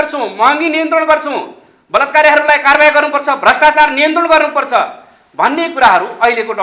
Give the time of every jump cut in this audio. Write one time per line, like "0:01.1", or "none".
none